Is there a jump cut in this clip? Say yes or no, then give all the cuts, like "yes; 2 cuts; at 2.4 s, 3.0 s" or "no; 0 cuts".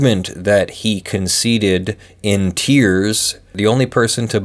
yes; 1 cut; at 3.4 s